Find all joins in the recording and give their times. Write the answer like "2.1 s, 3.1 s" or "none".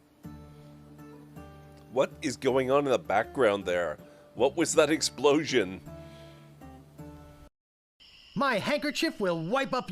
7.9 s